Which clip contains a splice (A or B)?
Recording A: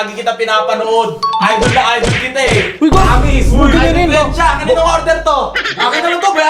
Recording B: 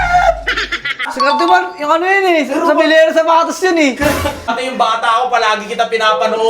B